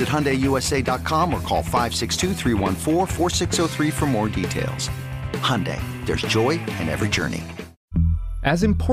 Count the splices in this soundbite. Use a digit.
1